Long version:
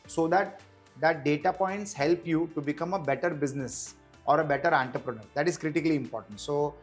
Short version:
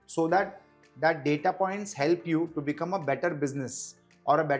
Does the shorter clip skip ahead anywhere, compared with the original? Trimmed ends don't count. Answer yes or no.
no